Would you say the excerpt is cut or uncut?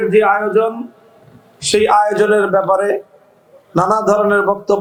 uncut